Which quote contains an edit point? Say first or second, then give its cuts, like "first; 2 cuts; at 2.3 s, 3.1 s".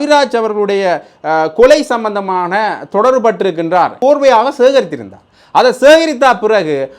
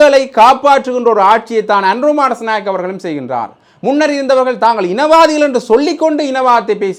first; 1 cut; at 4.0 s